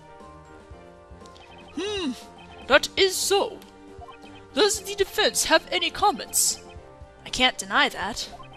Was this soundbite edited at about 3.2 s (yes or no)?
yes